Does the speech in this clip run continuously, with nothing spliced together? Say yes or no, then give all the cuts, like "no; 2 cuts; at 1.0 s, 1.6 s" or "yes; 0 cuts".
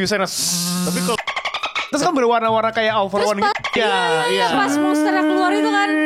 yes; 0 cuts